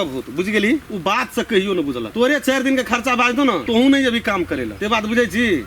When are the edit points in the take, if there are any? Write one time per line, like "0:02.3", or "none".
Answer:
0:00.9
0:02.1
0:03.6
0:04.7